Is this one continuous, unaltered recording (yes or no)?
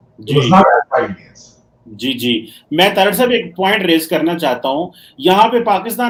yes